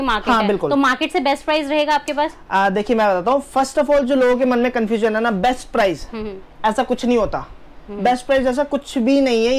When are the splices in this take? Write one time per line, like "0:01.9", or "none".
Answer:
none